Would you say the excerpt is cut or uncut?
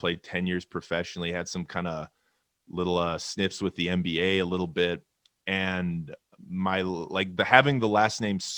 uncut